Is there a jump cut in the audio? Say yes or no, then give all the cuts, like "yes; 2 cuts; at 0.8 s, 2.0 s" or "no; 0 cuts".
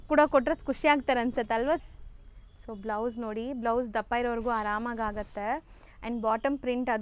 yes; 1 cut; at 1.8 s